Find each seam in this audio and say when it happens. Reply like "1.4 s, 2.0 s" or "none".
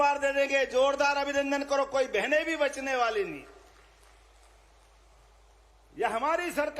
none